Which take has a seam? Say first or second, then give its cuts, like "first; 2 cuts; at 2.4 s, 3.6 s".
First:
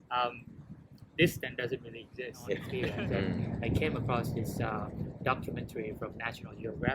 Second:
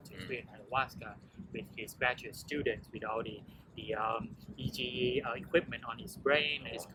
first; 1 cut; at 2.6 s